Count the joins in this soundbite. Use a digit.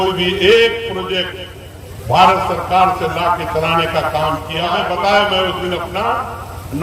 1